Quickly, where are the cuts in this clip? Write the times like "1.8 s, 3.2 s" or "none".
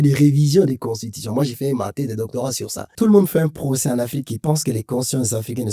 2.9 s